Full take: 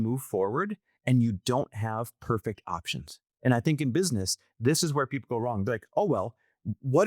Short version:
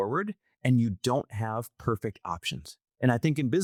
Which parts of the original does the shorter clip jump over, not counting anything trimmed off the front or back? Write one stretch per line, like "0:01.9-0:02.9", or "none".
none